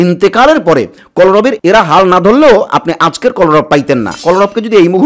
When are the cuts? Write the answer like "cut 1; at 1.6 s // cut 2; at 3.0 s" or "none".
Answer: cut 1; at 4.2 s